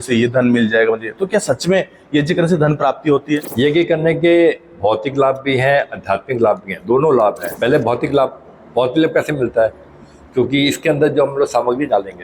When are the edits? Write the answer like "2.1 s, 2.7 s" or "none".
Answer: 3.5 s, 7.5 s